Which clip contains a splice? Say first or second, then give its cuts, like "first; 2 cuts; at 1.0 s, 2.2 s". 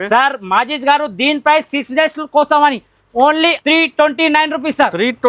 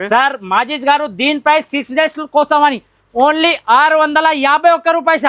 first; 1 cut; at 3.6 s